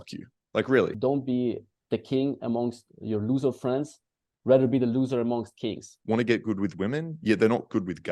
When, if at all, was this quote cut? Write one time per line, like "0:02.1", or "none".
0:00.9
0:05.9